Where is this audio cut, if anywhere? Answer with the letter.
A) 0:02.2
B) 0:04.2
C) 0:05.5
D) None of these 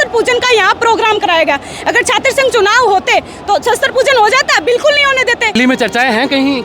C